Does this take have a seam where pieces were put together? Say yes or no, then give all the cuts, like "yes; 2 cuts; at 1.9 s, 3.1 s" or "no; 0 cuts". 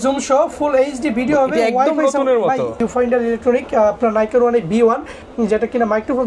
yes; 1 cut; at 2.8 s